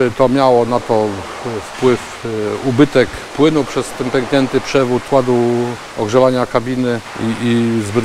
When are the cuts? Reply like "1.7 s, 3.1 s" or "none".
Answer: 5.1 s, 5.8 s, 7.1 s